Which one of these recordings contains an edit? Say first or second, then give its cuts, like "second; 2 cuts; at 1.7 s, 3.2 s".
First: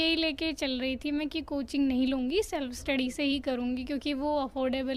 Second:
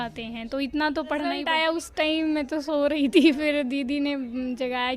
second; 1 cut; at 1.5 s